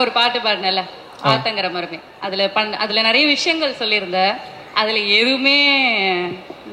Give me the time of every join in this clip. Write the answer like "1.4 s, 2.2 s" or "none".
none